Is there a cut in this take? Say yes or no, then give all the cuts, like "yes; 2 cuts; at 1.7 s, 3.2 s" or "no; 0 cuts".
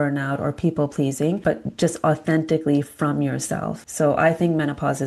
yes; 2 cuts; at 1.4 s, 3.8 s